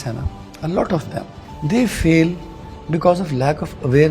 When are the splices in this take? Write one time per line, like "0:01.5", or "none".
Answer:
0:01.4